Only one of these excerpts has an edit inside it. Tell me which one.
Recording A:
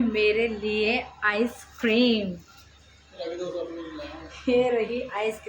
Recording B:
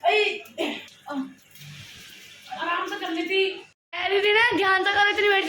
B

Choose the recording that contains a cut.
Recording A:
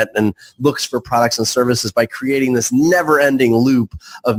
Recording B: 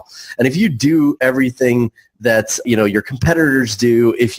B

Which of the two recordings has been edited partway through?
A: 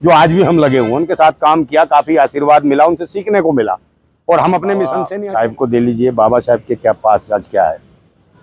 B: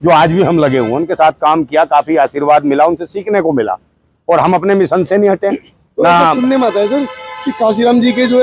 A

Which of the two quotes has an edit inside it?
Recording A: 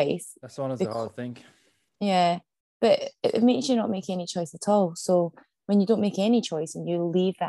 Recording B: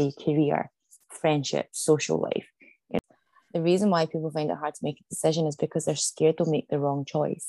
B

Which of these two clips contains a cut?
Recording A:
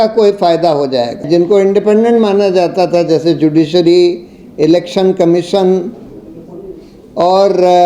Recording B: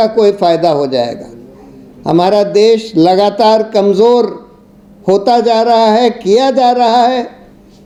A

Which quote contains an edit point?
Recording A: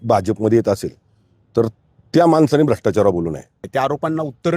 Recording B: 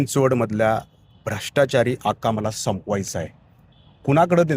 A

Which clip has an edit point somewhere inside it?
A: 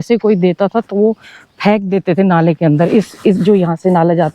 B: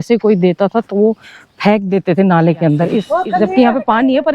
B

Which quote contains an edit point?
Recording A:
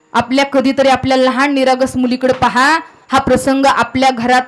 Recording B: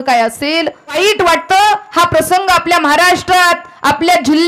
B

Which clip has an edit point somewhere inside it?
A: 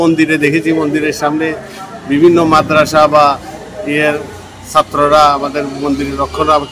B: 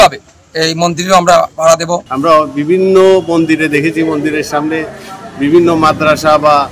B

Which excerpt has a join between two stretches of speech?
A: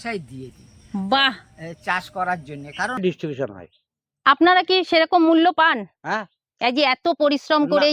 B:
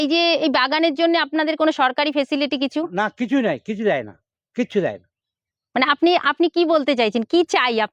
A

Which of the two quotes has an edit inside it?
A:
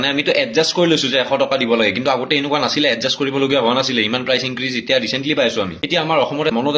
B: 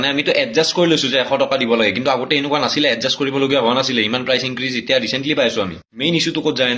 A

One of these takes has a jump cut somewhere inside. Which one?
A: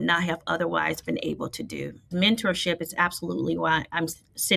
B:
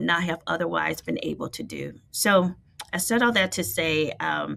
A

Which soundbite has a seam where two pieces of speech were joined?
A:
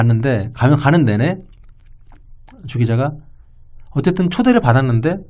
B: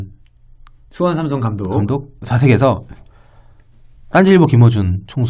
B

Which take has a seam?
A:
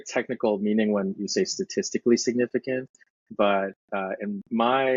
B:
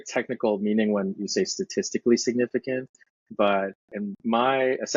B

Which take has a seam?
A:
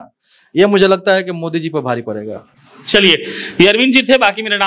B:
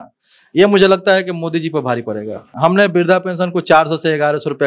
B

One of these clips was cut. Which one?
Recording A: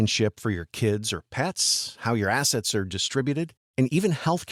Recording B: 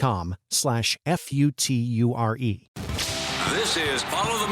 B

